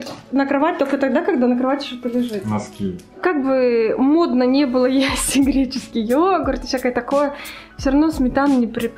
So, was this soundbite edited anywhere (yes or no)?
yes